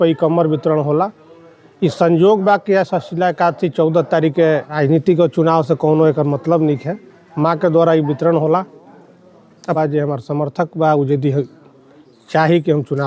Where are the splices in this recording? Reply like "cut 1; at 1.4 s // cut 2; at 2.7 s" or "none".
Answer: cut 1; at 4.8 s // cut 2; at 9.8 s